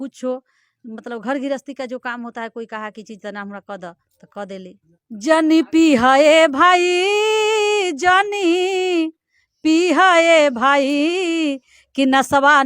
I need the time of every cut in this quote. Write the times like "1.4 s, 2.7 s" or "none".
4.9 s